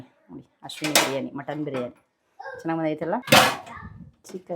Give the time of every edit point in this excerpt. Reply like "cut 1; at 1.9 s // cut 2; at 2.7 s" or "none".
cut 1; at 3.2 s